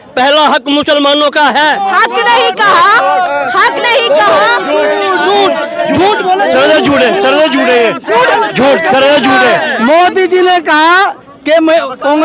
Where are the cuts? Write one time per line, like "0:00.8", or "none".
0:09.7